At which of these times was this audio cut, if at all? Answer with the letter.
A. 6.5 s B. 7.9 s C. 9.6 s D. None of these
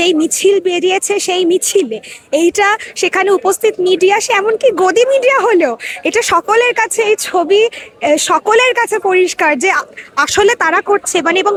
D